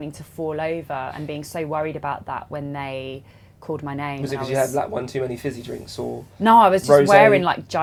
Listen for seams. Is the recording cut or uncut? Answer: uncut